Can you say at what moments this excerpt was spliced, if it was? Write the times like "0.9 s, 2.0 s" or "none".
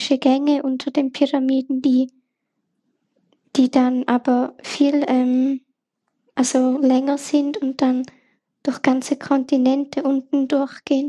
none